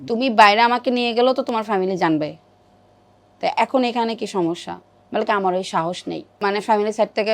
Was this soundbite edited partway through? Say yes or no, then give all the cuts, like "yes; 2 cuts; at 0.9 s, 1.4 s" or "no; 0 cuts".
yes; 1 cut; at 6.3 s